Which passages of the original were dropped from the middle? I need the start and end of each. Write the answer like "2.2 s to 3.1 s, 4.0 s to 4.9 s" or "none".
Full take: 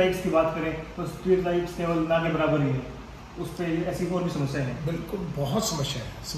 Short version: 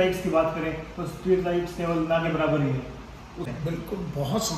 3.5 s to 4.7 s